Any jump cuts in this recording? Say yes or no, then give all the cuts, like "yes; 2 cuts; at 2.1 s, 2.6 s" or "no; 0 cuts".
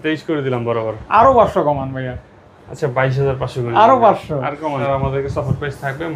yes; 1 cut; at 4.8 s